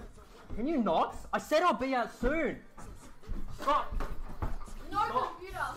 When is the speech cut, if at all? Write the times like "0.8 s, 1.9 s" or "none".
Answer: 2.6 s, 4.5 s